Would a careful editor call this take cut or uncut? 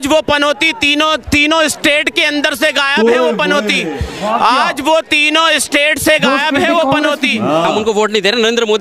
cut